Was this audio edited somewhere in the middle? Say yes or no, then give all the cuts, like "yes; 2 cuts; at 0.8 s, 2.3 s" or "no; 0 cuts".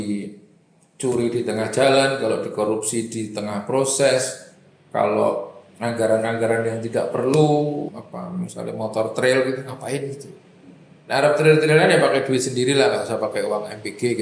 yes; 1 cut; at 7.9 s